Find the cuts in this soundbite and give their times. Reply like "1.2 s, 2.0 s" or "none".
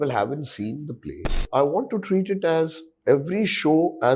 1.4 s